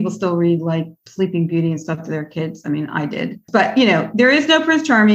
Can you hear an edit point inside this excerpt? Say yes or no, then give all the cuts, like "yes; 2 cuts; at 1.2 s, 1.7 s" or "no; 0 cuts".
no; 0 cuts